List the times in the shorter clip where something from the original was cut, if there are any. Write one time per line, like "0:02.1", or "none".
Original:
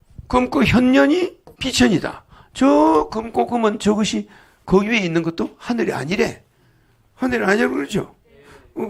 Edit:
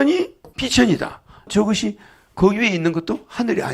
0:01.5